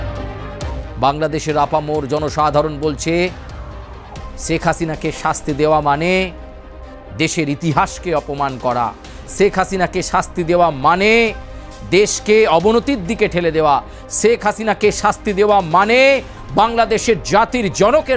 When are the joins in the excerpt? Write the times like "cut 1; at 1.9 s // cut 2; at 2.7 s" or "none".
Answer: cut 1; at 0.9 s